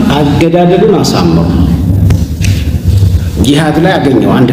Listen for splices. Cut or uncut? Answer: uncut